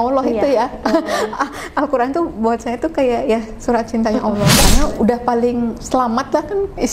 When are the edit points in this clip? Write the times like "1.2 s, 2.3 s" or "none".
4.6 s